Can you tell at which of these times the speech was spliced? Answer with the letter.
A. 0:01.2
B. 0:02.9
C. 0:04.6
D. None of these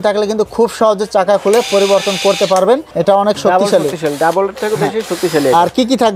B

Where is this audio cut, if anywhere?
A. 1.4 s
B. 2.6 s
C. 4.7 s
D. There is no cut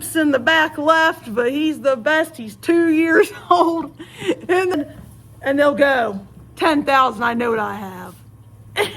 C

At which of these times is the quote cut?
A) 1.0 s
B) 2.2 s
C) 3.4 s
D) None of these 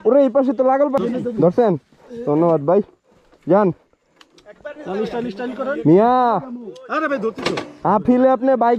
A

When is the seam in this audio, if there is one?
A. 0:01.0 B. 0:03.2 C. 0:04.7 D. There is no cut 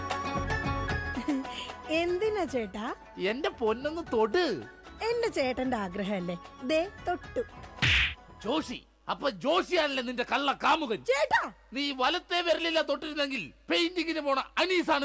D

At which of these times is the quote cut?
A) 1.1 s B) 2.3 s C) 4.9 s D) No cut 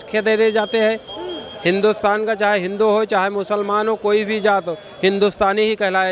D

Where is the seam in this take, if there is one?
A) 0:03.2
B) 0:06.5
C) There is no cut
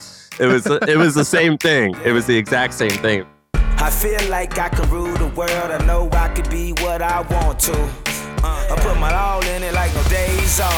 A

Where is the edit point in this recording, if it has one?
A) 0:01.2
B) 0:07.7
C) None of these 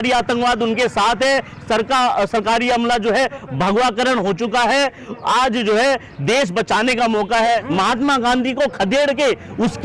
B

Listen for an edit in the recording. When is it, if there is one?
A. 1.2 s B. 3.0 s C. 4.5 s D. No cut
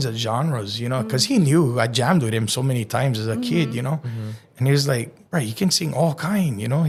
D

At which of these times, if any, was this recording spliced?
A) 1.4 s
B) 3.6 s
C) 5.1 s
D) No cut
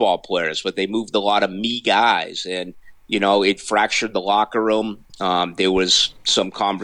D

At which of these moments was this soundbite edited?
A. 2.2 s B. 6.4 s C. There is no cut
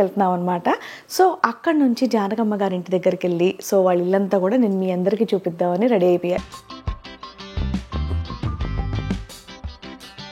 B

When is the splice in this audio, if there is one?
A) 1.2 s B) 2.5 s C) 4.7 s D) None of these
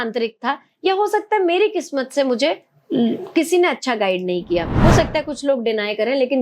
C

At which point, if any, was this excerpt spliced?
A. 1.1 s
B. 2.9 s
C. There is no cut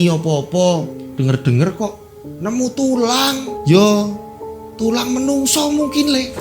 A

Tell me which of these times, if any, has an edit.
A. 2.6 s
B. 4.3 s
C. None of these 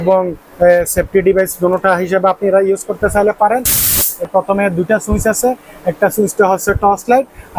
B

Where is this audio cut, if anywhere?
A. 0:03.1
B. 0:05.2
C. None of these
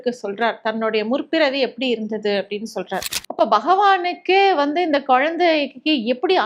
A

